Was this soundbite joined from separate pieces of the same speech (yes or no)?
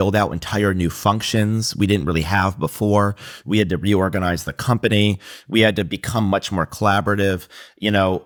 no